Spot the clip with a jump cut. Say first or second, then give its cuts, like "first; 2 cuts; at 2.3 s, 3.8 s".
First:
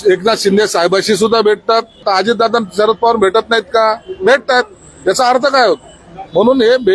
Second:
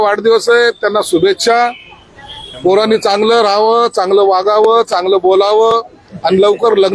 first; 1 cut; at 2.0 s